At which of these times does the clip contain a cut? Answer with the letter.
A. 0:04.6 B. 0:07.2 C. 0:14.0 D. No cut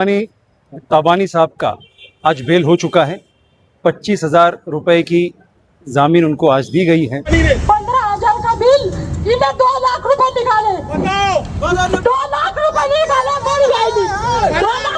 B